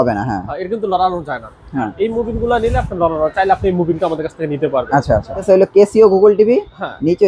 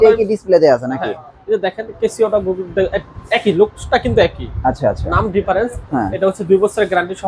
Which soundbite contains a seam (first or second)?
first